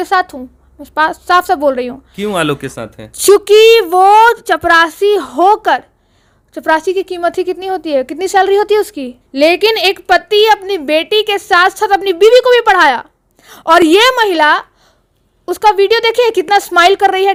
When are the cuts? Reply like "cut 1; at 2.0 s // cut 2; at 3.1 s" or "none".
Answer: none